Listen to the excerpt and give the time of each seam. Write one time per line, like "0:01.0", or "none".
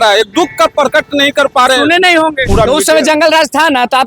0:02.4